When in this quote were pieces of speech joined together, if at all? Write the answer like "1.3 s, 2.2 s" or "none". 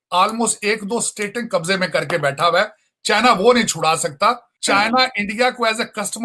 4.5 s